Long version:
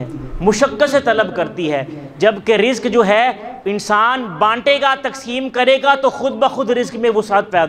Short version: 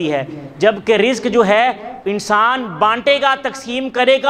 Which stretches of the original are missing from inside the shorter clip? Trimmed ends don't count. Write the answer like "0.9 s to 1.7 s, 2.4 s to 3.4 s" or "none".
none